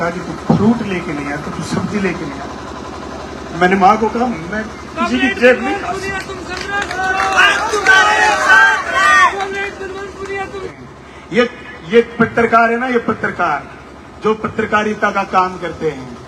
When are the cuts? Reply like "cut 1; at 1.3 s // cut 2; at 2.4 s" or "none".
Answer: cut 1; at 10.8 s